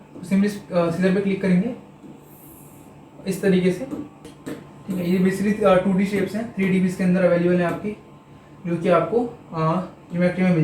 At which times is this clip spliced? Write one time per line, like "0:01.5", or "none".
0:04.3